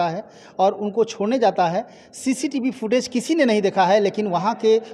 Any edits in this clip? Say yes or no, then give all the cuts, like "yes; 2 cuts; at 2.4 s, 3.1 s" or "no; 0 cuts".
no; 0 cuts